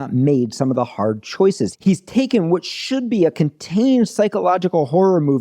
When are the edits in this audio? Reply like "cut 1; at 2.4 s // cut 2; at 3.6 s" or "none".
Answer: cut 1; at 1.7 s

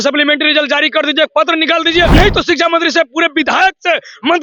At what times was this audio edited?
cut 1; at 2.1 s

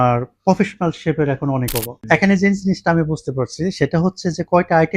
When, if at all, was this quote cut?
cut 1; at 2.0 s

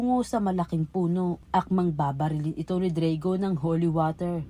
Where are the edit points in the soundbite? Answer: cut 1; at 1.4 s

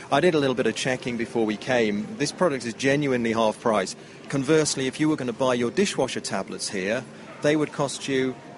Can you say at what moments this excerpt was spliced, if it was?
none

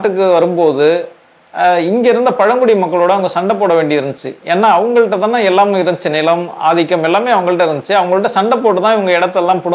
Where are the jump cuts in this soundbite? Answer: none

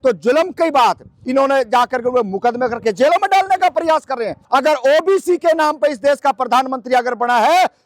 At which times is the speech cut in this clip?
cut 1; at 1.2 s // cut 2; at 4.3 s

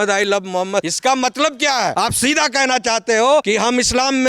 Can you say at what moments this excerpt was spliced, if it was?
cut 1; at 0.9 s // cut 2; at 1.9 s // cut 3; at 3.5 s

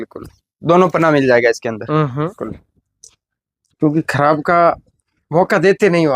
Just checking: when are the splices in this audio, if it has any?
cut 1; at 2.4 s

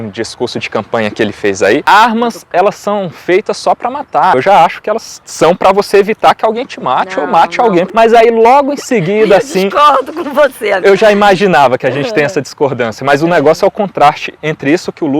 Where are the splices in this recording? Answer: cut 1; at 1.8 s // cut 2; at 4.3 s // cut 3; at 10.8 s

